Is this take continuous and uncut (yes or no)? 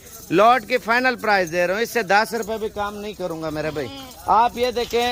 yes